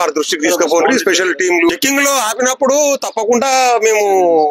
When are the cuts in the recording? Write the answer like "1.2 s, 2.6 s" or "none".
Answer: 1.7 s

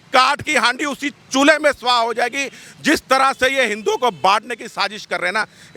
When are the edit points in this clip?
none

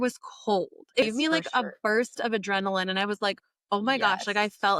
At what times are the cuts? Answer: 1.0 s

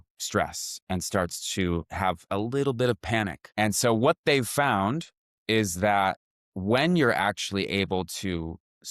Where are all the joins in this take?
2.2 s, 3.4 s

